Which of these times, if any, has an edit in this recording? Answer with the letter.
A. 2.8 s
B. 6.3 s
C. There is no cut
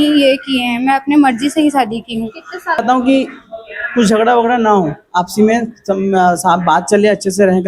A